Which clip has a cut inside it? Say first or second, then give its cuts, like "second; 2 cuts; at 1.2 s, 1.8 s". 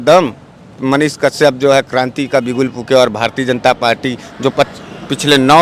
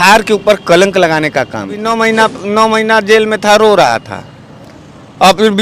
second; 1 cut; at 1.8 s